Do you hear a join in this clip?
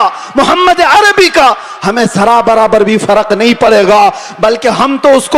no; 0 cuts

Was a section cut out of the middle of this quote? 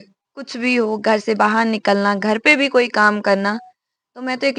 no; 0 cuts

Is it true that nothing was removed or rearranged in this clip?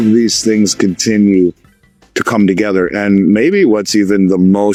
yes; 0 cuts

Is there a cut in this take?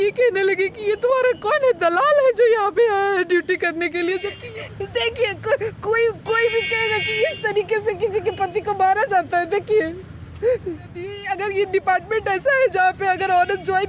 yes; 2 cuts; at 4.4 s, 11.2 s

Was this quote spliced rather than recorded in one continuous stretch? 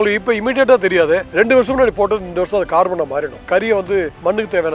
yes; 2 cuts; at 1.3 s, 3.6 s

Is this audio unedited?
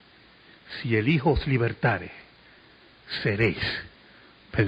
yes; 0 cuts

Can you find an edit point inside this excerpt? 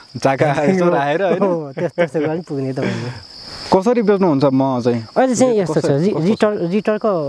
yes; 1 cut; at 3.3 s

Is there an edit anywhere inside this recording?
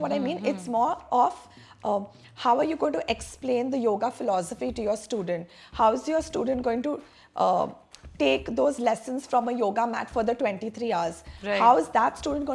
no; 0 cuts

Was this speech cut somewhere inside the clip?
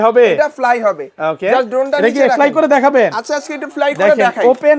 no; 0 cuts

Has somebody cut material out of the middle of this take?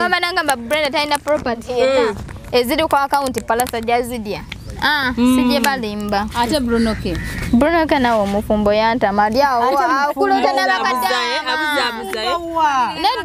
no; 0 cuts

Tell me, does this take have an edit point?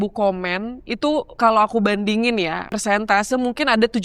yes; 2 cuts; at 1.3 s, 2.7 s

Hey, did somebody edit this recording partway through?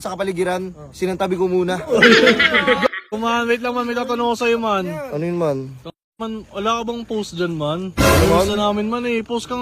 yes; 1 cut; at 3.0 s

